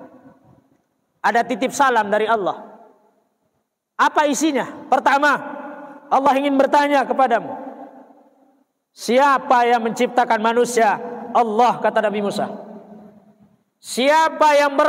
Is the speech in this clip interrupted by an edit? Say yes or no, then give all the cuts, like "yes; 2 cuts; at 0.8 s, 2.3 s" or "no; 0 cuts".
no; 0 cuts